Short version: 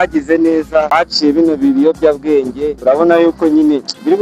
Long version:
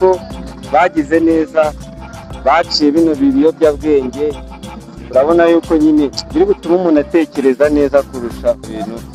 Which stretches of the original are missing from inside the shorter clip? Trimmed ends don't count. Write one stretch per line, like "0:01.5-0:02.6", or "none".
0:01.7-0:02.5
0:04.3-0:05.0